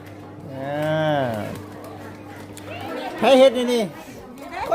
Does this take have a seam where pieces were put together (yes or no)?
yes